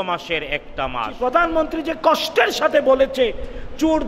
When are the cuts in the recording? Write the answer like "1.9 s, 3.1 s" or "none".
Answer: 1.1 s